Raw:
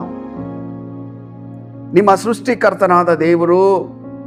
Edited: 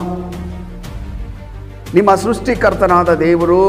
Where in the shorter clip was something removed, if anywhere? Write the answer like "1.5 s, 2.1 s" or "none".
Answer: none